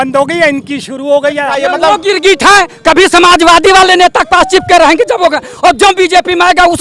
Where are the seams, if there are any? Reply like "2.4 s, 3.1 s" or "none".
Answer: 1.5 s